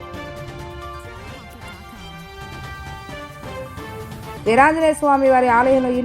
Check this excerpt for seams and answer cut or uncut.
cut